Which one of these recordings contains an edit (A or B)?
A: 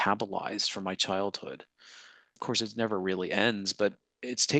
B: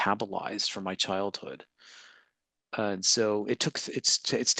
A